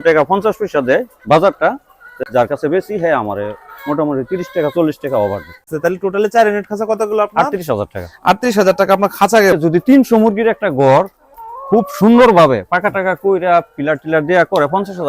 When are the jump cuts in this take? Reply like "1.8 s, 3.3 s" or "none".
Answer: 2.1 s, 5.7 s, 9.5 s